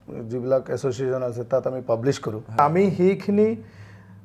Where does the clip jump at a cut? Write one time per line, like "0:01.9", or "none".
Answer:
0:02.6